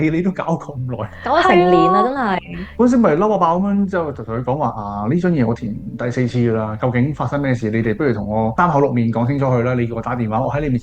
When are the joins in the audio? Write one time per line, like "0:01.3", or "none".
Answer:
none